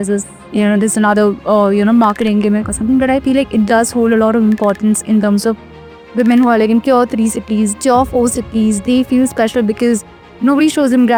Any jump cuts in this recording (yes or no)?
no